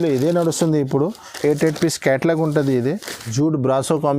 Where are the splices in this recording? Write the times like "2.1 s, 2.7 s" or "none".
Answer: 3.3 s